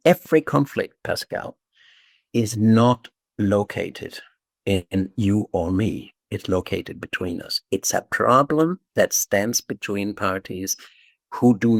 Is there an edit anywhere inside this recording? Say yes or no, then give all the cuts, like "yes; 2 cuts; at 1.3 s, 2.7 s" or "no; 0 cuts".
no; 0 cuts